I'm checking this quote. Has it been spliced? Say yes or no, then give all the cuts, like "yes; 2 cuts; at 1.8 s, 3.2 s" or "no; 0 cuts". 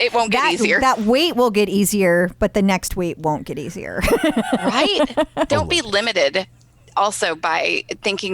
yes; 1 cut; at 5.5 s